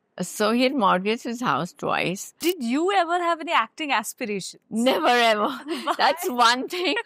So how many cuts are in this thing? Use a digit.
1